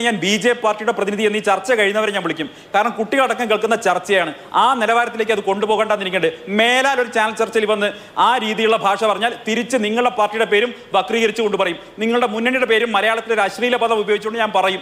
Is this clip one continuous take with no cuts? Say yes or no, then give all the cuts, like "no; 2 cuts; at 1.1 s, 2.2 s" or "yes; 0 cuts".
yes; 0 cuts